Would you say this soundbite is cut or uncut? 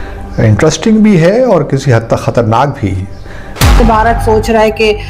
cut